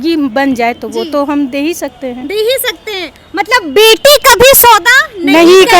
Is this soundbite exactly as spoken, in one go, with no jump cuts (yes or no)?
yes